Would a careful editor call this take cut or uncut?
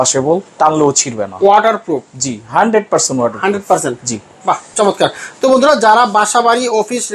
uncut